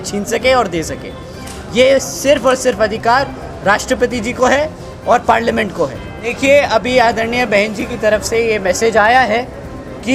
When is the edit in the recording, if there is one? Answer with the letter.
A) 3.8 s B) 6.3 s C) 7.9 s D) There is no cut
B